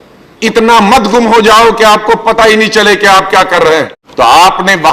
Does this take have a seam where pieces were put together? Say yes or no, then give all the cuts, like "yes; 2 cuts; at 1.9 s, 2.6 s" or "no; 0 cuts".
yes; 1 cut; at 4.0 s